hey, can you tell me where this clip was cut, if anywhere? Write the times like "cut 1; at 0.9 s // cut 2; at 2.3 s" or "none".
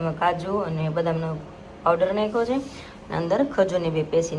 none

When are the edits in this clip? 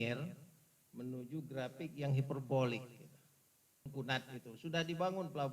cut 1; at 3.9 s

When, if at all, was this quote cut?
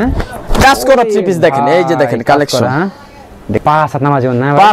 cut 1; at 3.6 s

